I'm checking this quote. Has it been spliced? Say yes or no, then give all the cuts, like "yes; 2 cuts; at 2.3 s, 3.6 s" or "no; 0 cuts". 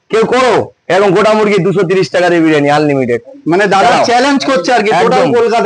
no; 0 cuts